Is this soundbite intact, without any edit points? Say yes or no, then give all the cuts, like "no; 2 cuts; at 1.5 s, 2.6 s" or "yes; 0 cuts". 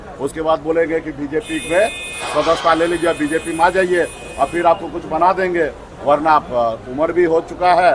yes; 0 cuts